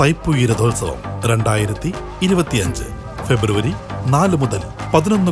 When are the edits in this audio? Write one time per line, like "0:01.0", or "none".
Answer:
none